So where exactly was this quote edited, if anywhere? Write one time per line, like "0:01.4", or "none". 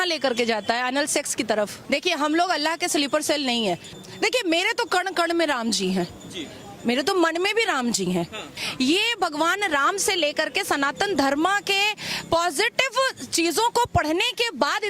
0:01.8
0:03.9
0:08.6